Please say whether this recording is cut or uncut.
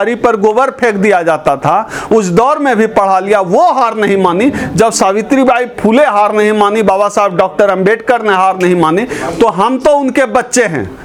uncut